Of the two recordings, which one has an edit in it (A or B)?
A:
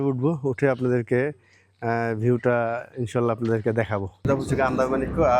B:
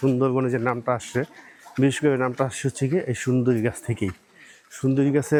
A